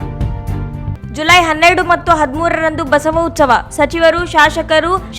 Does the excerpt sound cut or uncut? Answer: cut